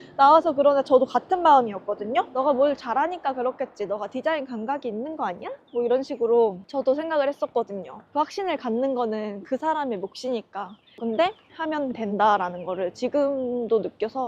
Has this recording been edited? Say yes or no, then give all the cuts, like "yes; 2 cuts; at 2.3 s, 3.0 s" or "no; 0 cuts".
no; 0 cuts